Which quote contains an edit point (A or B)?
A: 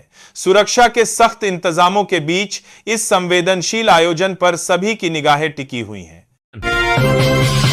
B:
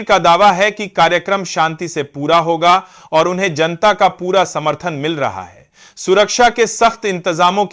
A